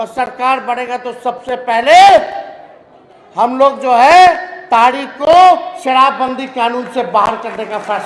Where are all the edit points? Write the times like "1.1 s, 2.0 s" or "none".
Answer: none